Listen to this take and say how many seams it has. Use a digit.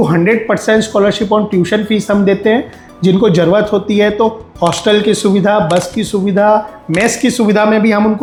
0